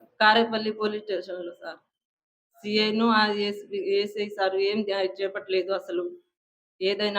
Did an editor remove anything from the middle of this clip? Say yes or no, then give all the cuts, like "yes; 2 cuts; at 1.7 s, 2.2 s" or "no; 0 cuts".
yes; 1 cut; at 4.3 s